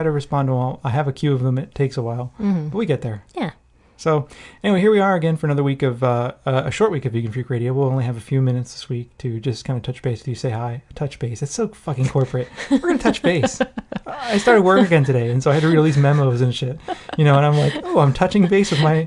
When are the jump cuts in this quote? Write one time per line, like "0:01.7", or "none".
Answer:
0:05.1